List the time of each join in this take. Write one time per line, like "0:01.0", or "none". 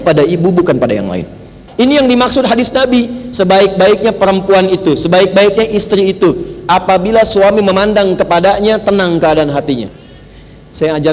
0:01.6
0:09.9